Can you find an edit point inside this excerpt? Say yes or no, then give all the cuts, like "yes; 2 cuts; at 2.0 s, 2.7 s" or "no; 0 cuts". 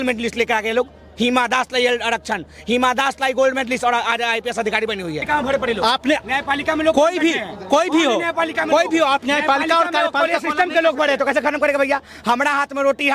yes; 1 cut; at 5.2 s